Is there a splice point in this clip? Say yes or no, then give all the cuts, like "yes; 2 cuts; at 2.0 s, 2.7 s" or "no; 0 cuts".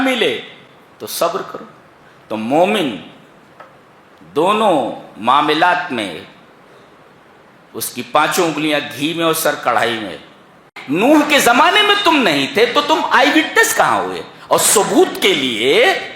yes; 1 cut; at 10.7 s